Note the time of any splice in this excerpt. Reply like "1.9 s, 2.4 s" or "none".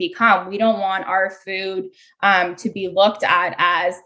none